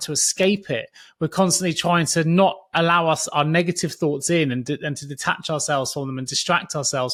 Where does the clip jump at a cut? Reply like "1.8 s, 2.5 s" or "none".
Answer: none